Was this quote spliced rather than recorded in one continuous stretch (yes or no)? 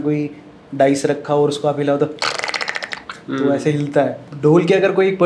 yes